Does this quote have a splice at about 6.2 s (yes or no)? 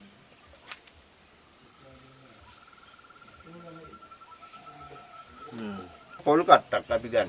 yes